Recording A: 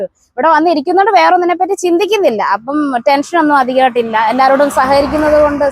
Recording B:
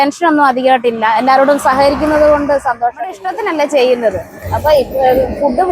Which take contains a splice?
B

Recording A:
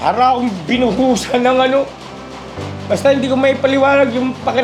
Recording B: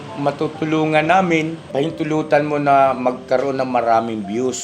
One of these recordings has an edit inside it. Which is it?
B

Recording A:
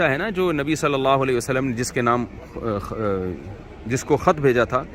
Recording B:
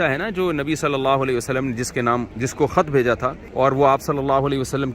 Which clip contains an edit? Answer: B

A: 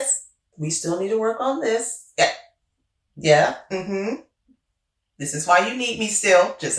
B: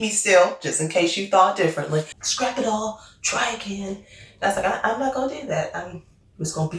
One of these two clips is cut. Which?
B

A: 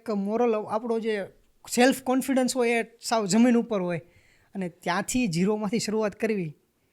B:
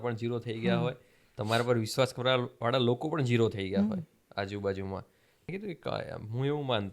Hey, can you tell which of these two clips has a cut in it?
B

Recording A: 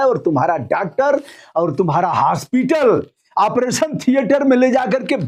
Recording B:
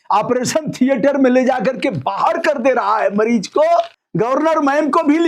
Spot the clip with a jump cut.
B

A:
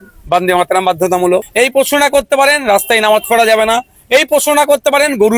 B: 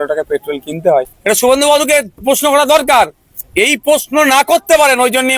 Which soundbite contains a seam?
B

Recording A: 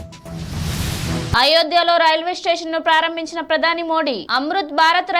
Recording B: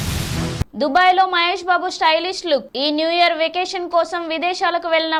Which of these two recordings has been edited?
A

